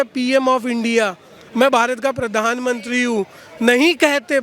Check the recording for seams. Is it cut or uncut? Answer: uncut